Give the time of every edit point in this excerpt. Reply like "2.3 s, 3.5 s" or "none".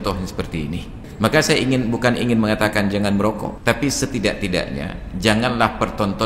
1.0 s, 3.5 s